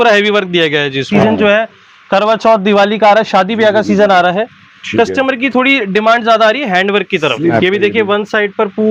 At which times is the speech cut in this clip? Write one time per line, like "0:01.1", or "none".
0:01.1
0:07.5